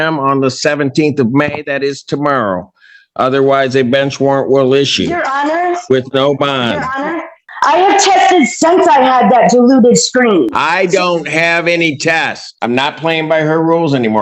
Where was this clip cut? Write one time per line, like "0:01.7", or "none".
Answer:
0:07.5
0:12.5